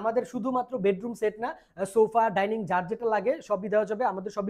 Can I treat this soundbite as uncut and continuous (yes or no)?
yes